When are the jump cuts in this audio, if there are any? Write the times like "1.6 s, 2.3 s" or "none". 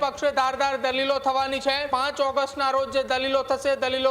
1.9 s